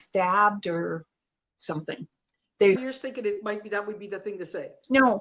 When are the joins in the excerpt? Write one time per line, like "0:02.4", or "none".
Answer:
0:02.8